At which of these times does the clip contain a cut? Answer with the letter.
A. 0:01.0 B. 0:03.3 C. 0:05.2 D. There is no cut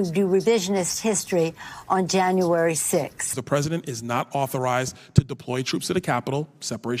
B